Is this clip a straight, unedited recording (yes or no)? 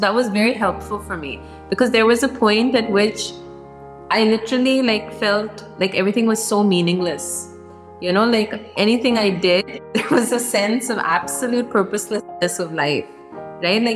yes